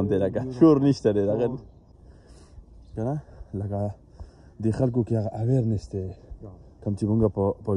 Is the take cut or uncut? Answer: cut